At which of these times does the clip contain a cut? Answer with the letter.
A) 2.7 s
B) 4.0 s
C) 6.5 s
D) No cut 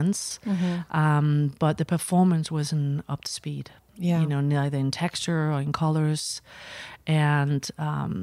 D